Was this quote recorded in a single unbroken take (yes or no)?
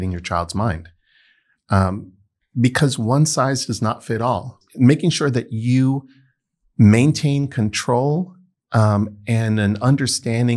no